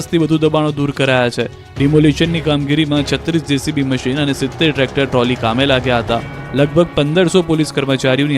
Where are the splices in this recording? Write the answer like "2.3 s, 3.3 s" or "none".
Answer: 6.1 s